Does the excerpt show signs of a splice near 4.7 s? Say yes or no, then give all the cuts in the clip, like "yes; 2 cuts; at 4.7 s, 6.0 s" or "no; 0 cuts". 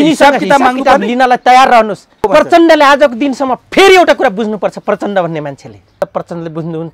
no; 2 cuts; at 2.3 s, 6.0 s